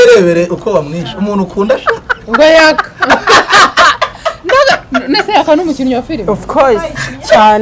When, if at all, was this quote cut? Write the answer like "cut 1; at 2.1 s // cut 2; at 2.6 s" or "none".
none